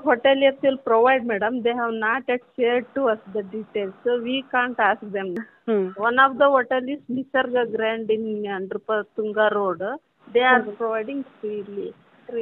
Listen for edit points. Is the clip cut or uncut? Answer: cut